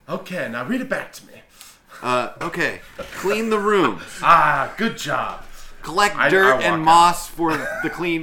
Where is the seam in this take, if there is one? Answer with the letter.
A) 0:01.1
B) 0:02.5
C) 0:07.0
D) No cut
D